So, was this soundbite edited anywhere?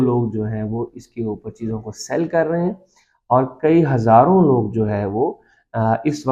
no; 0 cuts

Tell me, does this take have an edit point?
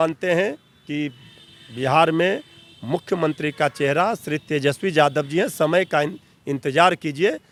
no; 0 cuts

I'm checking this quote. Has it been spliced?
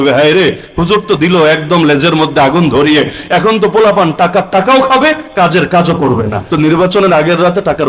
yes; 1 cut; at 6.4 s

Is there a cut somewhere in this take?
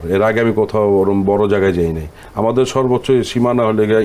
no; 0 cuts

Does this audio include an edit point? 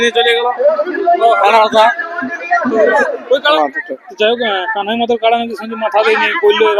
yes; 1 cut; at 3.6 s

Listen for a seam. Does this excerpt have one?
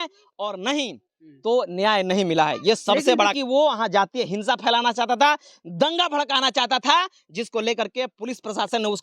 yes; 1 cut; at 3.3 s

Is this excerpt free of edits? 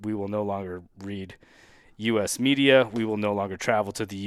yes; 0 cuts

